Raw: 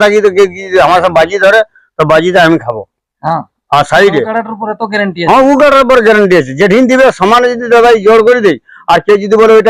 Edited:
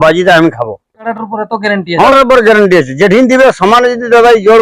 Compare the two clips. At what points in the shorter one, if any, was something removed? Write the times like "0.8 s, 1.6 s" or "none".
1.0 s, 2.1 s